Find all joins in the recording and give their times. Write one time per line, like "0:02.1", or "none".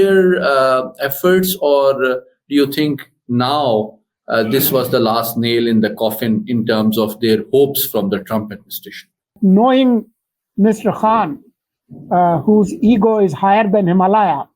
0:09.3